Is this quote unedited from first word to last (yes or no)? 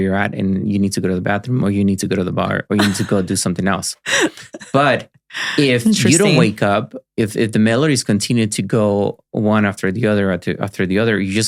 yes